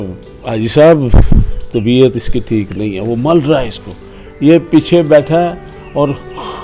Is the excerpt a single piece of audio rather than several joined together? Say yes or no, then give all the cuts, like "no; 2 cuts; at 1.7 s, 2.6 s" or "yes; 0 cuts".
yes; 0 cuts